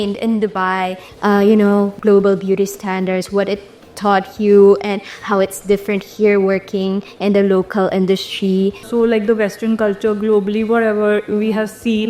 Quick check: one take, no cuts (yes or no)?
no